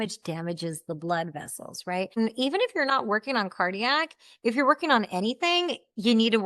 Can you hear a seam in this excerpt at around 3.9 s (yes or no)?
no